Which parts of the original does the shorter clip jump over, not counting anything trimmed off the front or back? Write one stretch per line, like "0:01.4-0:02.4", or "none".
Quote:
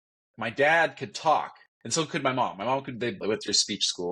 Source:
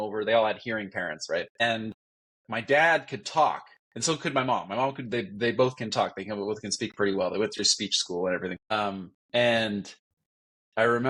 0:05.3-0:07.3